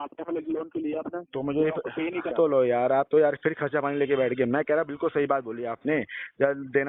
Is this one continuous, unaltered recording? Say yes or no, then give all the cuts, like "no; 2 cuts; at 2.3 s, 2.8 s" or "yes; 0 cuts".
no; 1 cut; at 2.3 s